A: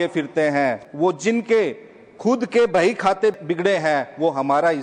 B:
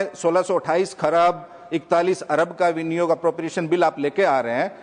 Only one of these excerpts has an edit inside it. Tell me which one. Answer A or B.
A